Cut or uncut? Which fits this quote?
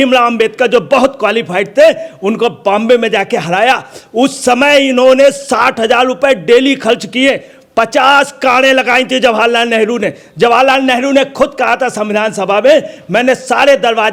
uncut